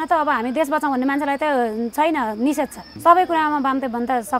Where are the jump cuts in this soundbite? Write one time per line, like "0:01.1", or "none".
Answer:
0:02.8